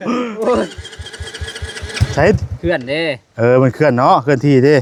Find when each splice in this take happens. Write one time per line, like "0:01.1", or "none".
none

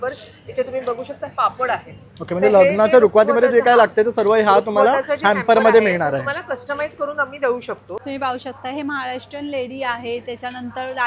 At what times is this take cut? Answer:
0:07.9

